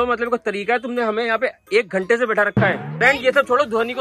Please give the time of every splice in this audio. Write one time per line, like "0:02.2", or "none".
0:02.9